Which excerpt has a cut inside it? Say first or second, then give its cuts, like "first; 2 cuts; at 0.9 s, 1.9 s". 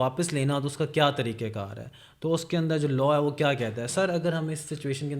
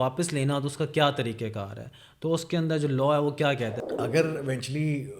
second; 1 cut; at 3.8 s